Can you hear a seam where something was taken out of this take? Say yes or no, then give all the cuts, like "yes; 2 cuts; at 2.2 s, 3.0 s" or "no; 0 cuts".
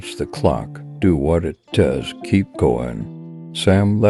no; 0 cuts